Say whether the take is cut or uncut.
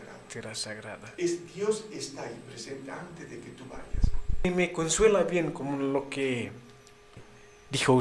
cut